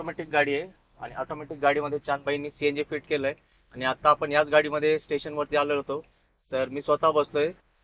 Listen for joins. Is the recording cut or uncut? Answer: uncut